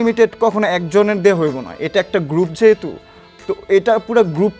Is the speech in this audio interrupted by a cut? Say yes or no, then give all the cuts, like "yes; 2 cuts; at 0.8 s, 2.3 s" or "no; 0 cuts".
no; 0 cuts